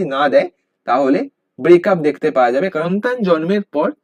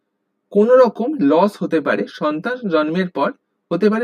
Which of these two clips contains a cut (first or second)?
first